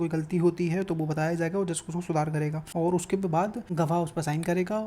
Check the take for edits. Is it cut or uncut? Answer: cut